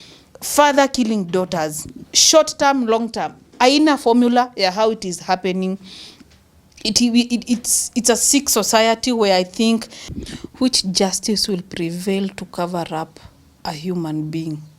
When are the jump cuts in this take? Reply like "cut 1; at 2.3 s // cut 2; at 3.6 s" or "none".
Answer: cut 1; at 10.1 s